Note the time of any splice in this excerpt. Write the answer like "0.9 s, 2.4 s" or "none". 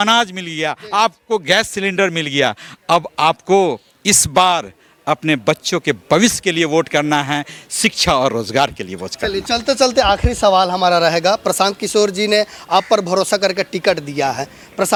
none